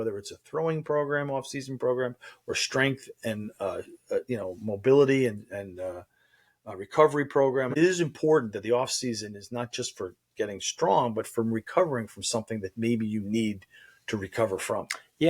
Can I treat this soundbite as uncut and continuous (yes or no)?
no